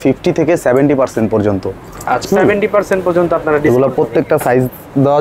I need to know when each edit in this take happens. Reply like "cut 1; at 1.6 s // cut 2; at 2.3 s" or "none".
cut 1; at 2.3 s